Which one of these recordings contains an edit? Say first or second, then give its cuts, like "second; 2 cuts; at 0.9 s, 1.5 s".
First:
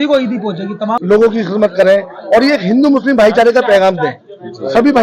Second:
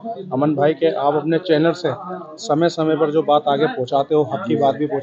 first; 1 cut; at 1.0 s